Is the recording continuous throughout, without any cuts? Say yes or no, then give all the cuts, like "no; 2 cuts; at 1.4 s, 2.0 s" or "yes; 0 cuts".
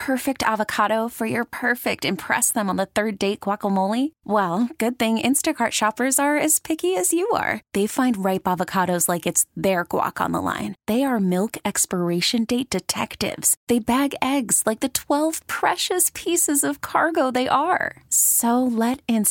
yes; 0 cuts